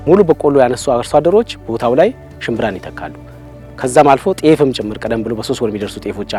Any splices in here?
no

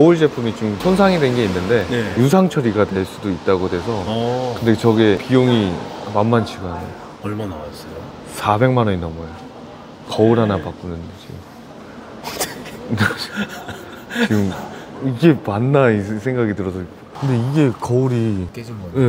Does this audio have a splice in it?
no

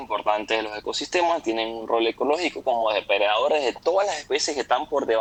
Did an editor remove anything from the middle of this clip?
no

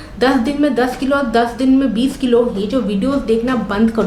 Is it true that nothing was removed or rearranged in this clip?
yes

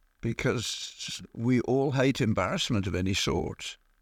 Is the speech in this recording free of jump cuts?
yes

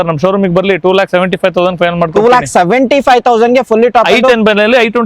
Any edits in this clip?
no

